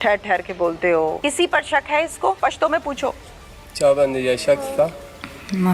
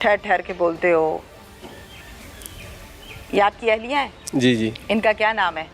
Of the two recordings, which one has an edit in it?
first; 2 cuts; at 1.2 s, 2.4 s

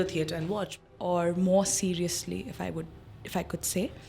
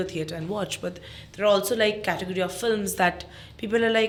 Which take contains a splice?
first; 1 cut; at 0.9 s

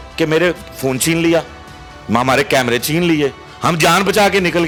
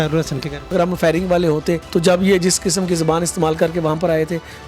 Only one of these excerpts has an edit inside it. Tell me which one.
second; 2 cuts; at 0.7 s, 1.8 s

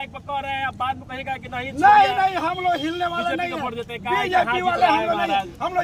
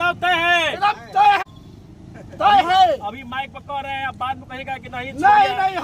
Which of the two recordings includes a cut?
second; 1 cut; at 1.4 s

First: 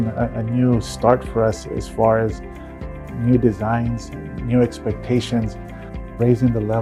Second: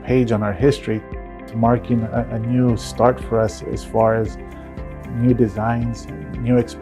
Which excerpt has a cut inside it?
second; 1 cut; at 1.0 s

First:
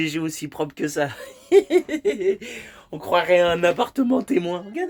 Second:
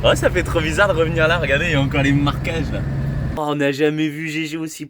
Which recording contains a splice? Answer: second; 1 cut; at 3.2 s

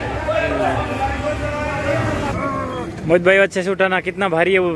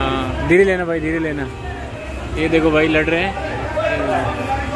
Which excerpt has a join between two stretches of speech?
first; 1 cut; at 2.3 s

